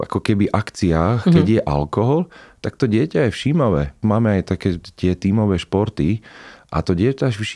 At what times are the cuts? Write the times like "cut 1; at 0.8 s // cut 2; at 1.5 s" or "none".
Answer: cut 1; at 3.9 s